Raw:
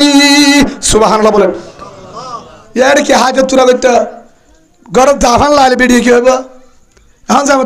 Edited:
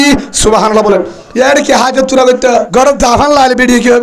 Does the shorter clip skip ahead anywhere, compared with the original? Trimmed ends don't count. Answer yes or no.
yes